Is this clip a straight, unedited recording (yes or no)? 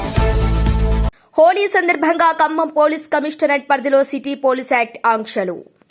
no